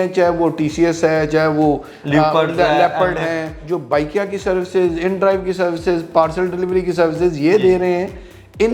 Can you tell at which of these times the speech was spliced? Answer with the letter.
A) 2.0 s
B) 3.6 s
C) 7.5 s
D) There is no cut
B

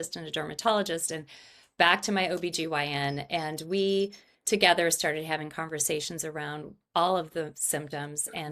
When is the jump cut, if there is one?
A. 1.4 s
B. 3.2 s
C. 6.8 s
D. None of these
D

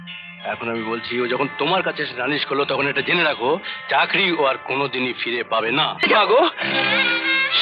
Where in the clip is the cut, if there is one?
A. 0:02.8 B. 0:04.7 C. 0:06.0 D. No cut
C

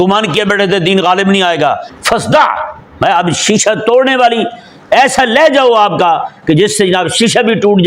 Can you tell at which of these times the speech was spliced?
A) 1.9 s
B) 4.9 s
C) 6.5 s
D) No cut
A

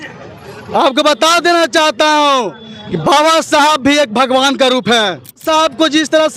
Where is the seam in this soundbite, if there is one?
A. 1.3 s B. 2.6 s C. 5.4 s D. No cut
C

